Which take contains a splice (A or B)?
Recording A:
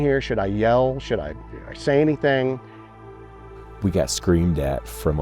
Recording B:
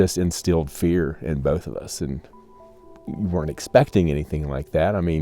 A